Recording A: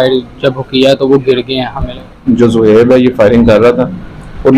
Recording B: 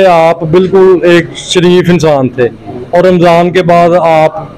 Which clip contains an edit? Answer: A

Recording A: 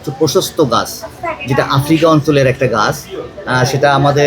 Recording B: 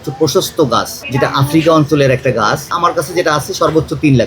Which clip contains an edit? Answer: B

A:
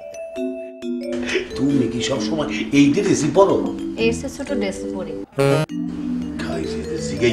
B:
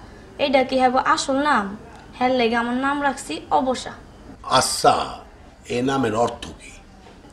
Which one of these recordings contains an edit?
A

